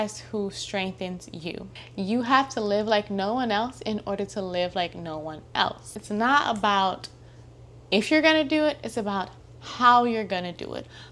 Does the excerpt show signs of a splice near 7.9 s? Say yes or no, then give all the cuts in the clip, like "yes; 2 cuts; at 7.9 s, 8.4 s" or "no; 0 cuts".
no; 2 cuts; at 1.7 s, 5.9 s